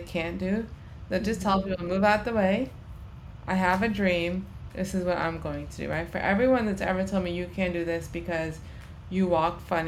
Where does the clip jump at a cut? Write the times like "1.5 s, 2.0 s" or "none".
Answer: none